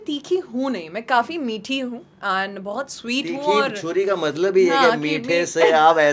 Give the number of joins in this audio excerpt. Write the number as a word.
zero